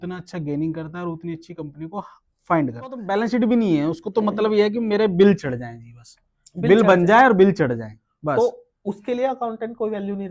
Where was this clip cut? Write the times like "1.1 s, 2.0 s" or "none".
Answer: 3.1 s